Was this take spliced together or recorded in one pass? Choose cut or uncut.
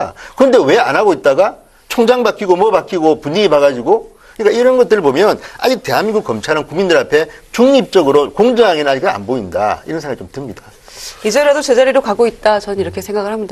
uncut